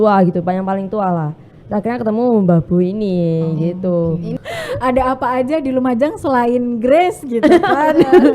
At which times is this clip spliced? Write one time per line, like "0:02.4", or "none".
0:04.3